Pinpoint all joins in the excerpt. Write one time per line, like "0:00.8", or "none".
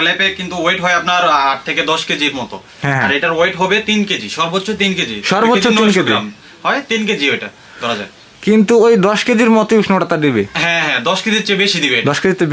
none